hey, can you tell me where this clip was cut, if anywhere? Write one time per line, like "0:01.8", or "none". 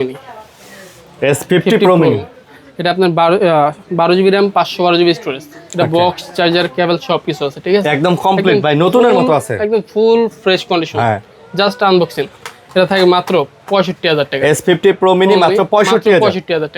none